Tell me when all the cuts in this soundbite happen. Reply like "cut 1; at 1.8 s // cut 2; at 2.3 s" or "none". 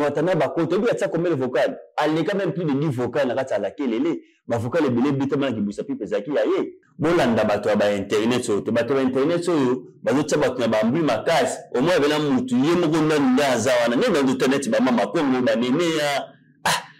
cut 1; at 6.8 s